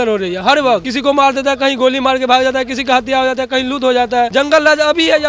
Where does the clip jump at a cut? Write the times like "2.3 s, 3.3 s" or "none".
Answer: 0.9 s, 4.3 s